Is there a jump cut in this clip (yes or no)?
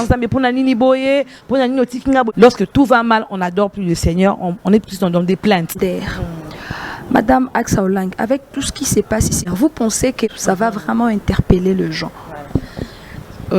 yes